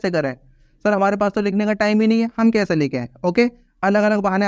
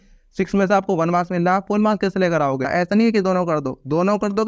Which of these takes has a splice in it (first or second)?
second